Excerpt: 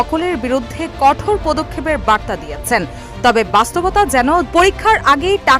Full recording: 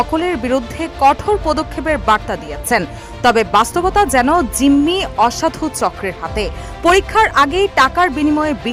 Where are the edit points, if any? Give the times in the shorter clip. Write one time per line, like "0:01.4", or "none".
0:04.5

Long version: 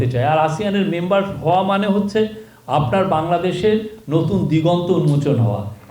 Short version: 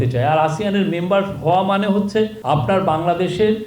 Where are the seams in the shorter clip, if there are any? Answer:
0:02.4

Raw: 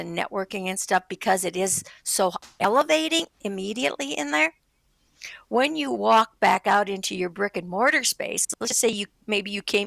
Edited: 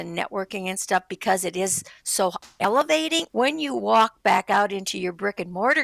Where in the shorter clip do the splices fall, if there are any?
0:03.3

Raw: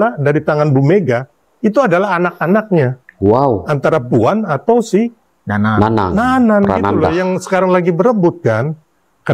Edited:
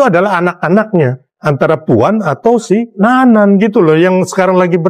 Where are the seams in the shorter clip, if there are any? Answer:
0:01.4
0:02.9

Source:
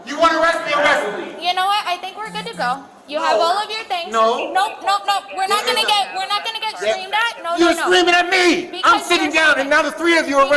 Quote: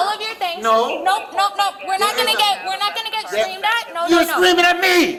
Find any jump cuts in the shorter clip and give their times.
none

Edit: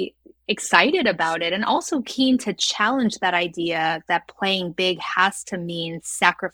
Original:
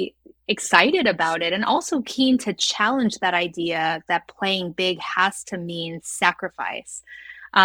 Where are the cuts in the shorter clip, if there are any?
none

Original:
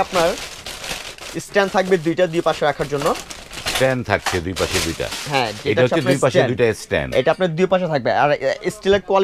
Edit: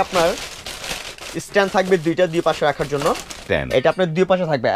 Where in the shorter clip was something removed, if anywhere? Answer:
0:03.4

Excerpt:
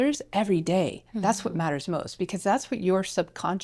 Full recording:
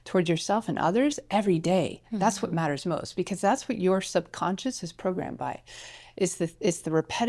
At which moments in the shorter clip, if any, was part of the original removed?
none

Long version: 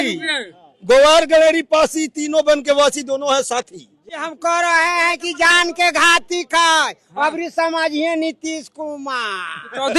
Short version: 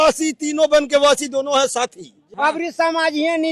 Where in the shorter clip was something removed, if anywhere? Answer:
0:02.2

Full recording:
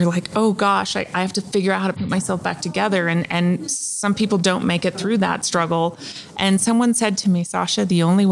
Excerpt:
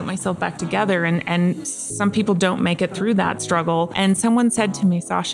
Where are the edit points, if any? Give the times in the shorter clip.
0:03.9

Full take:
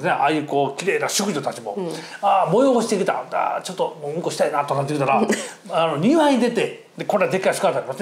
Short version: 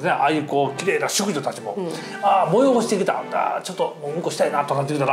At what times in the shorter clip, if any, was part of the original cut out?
none

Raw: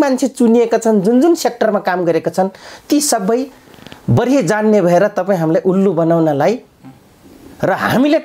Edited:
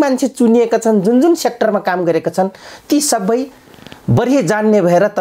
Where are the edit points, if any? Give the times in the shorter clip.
none

